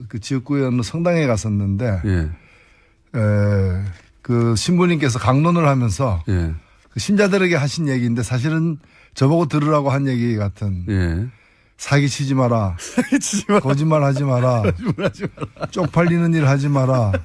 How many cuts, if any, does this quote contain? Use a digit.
0